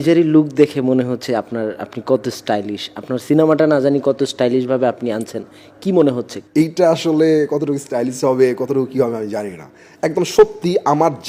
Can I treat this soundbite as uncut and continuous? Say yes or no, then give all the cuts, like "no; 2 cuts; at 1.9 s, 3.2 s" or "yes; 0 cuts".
yes; 0 cuts